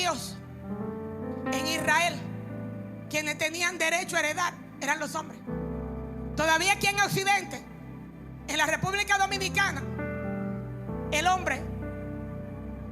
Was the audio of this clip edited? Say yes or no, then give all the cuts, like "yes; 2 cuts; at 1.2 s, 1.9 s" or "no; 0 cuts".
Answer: yes; 1 cut; at 10.7 s